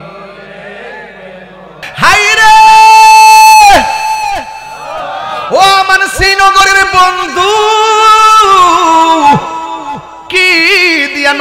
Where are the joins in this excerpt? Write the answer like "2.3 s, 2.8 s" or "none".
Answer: 1.8 s